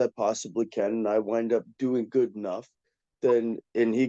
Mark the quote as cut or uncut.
uncut